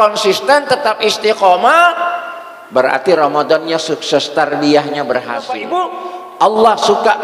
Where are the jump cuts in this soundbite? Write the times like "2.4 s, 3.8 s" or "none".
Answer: 5.7 s